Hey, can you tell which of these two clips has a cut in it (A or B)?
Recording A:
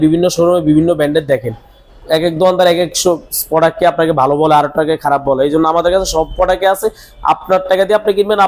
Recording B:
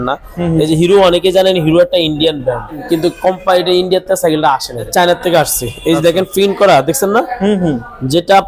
B